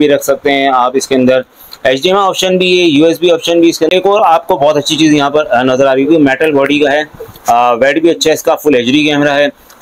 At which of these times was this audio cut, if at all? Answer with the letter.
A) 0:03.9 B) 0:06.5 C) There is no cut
A